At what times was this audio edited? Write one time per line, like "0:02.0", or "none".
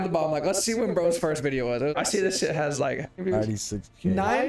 0:01.9
0:03.2